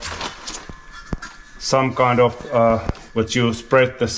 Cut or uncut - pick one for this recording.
cut